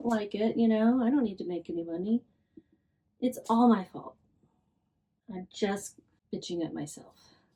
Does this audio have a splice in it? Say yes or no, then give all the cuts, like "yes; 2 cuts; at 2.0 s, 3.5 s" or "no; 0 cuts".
no; 0 cuts